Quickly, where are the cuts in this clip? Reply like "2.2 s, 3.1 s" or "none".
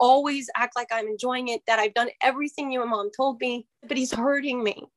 3.9 s